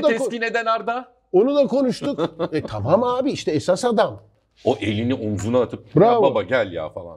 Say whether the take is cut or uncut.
cut